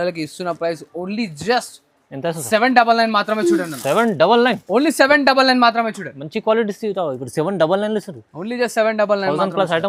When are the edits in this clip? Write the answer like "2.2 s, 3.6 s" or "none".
none